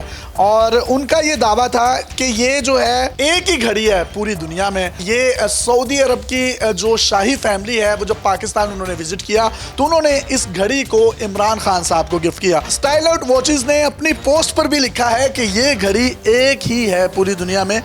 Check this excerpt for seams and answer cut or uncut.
cut